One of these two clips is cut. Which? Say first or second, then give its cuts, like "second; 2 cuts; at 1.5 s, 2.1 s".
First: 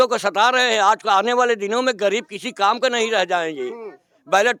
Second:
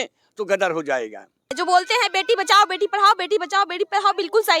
second; 1 cut; at 1.5 s